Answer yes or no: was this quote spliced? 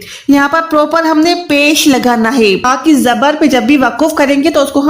yes